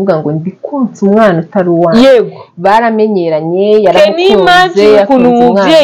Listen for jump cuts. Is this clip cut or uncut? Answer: uncut